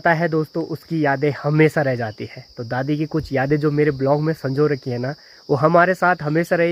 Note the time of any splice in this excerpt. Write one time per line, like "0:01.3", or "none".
none